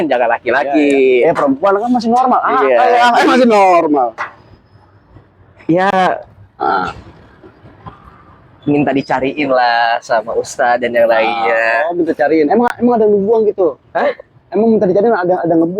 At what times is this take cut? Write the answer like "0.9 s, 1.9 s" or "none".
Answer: none